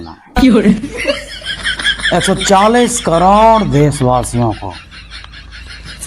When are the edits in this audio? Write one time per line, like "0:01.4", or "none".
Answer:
0:04.8